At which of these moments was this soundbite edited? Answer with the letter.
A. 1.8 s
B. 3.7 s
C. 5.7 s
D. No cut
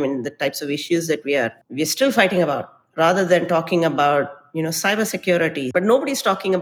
C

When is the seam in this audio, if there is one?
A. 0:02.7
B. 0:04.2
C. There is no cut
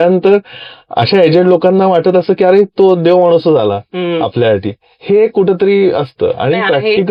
C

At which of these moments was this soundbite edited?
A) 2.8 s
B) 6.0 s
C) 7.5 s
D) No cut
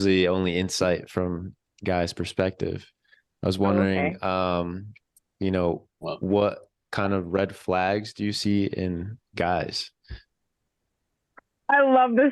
D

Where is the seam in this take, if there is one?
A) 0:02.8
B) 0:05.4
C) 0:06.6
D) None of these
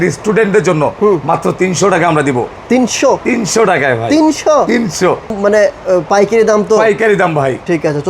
B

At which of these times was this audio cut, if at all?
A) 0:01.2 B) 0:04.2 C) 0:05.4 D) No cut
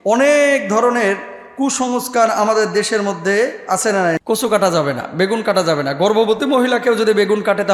B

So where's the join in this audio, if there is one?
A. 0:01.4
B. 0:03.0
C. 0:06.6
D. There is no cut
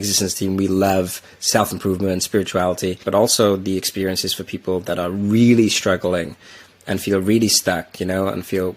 B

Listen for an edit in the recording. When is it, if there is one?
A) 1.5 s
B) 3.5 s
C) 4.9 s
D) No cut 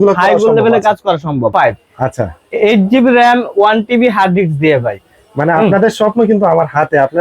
A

